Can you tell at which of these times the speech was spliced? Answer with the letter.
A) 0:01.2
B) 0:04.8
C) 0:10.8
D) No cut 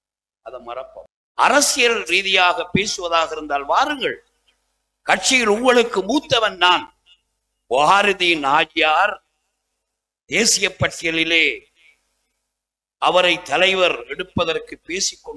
A